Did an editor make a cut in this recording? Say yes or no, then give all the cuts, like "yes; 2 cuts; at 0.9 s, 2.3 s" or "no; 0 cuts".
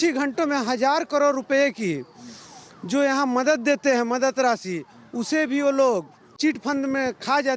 yes; 1 cut; at 6.2 s